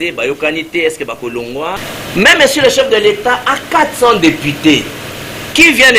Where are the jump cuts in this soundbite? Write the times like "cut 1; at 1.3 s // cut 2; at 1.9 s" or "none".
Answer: cut 1; at 1.9 s